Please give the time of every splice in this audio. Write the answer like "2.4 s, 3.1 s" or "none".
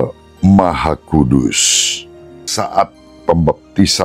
2.5 s